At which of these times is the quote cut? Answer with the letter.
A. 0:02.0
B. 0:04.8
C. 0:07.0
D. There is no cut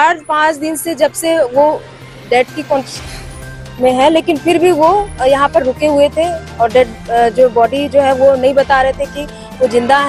D